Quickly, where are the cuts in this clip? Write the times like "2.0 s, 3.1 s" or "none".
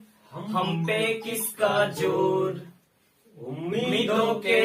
none

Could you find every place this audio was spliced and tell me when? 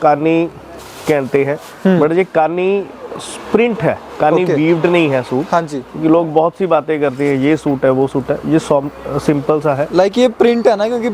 none

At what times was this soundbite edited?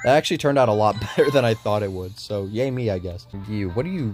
3.1 s

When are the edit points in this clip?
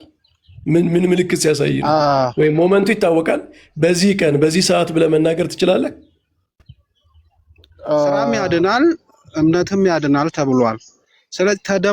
8.3 s

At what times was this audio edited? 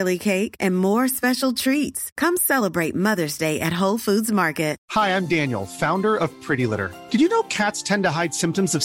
4.8 s

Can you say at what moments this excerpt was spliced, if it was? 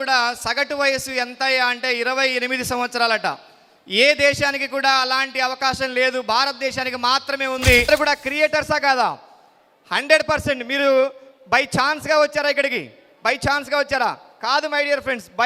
7.9 s

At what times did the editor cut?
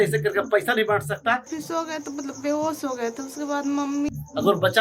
1.5 s, 4.1 s

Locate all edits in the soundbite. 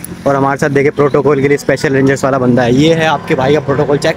none

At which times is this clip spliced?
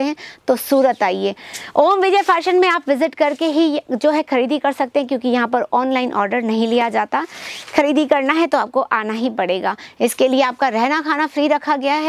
none

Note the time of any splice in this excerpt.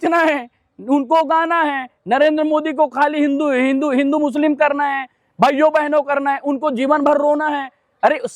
none

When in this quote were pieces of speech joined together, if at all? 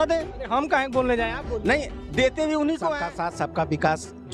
3.1 s

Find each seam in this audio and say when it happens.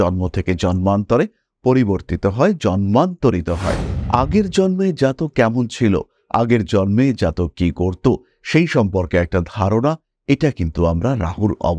3.9 s

